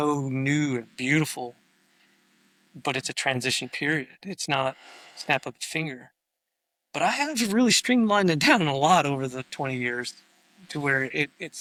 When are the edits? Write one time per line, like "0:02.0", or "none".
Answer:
none